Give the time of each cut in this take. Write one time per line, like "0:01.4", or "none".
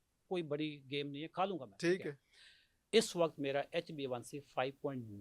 0:02.9